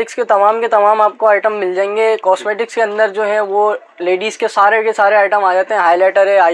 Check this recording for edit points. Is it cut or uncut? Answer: uncut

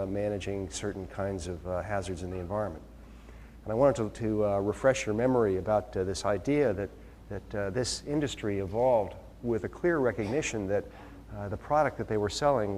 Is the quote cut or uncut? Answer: uncut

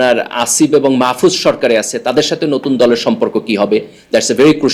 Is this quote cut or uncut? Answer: uncut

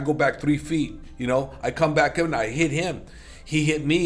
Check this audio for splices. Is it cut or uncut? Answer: uncut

